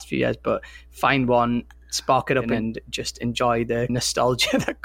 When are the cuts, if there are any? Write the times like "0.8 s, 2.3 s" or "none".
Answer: 2.5 s, 3.9 s

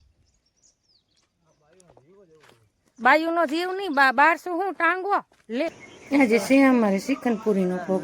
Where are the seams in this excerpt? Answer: 5.9 s

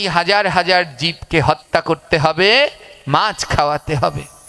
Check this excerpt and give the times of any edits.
none

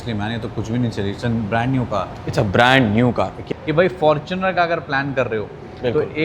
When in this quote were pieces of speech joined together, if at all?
3.4 s

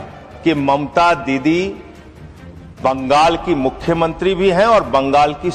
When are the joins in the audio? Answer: none

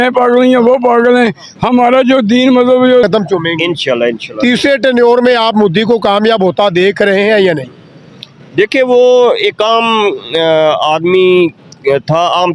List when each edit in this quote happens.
3.0 s

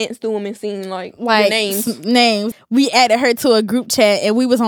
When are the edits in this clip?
2.5 s

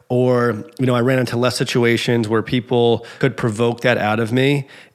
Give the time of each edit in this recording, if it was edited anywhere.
3.1 s

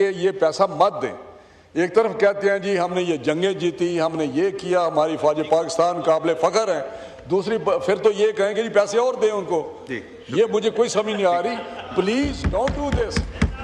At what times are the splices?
none

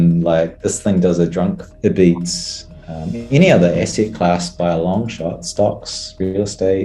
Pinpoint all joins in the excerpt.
1.7 s

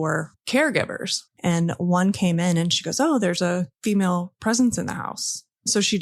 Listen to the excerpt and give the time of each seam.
1.2 s

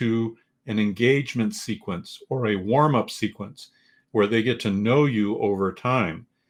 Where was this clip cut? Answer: none

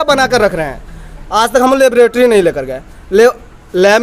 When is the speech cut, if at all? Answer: none

